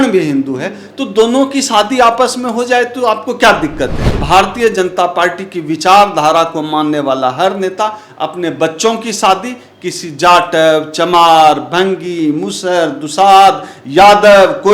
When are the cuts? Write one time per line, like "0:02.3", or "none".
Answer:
0:04.1